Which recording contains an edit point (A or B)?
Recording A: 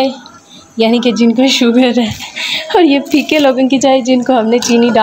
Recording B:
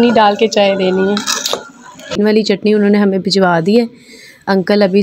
B